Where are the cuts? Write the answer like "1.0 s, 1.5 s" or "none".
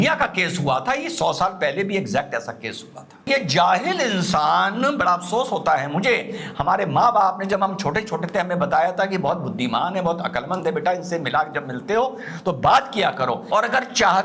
3.2 s, 13.4 s